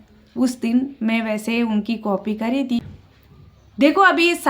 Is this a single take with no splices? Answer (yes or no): no